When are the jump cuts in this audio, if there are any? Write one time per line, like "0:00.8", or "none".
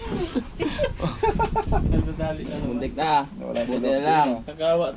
none